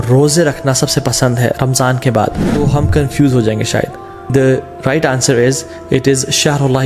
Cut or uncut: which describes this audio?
cut